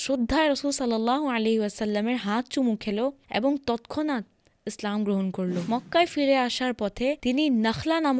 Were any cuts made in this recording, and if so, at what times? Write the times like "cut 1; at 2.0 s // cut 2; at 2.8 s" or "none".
cut 1; at 5.6 s

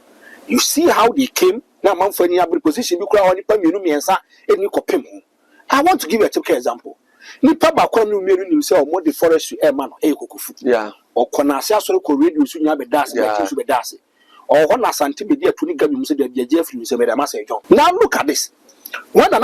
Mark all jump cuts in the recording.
cut 1; at 17.5 s

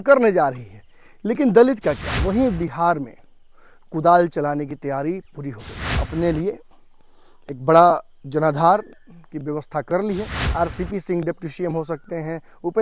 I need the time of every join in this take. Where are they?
cut 1; at 2.1 s // cut 2; at 6.0 s // cut 3; at 10.4 s

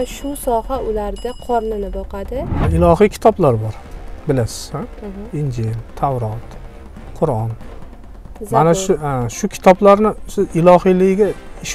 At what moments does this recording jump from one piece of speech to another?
cut 1; at 2.6 s

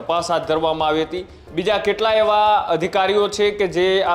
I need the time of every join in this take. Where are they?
cut 1; at 1.4 s

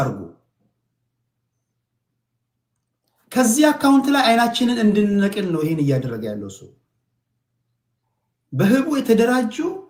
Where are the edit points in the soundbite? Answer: none

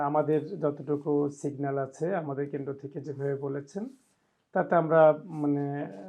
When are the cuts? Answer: none

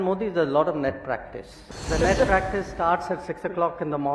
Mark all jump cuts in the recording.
cut 1; at 1.6 s

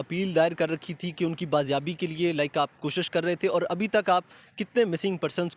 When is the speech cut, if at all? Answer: none

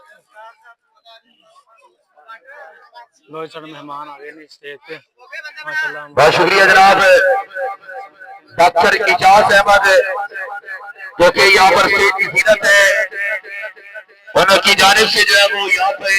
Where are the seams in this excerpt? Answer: none

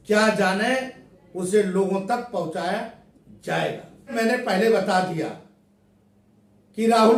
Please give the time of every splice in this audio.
none

